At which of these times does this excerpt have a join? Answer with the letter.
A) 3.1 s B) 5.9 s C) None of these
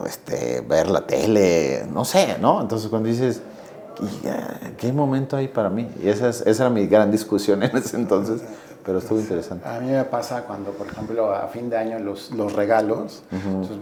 C